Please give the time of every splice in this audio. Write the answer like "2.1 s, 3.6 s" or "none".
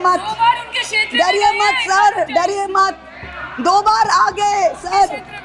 none